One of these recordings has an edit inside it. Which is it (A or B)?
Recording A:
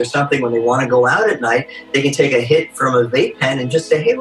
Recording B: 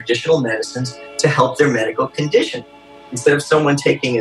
B